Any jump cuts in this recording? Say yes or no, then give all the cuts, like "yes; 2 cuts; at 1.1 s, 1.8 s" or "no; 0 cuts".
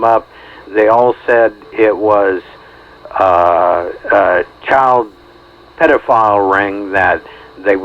no; 0 cuts